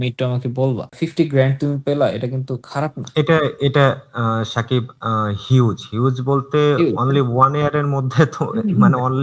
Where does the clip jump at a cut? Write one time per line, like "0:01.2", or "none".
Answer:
0:01.0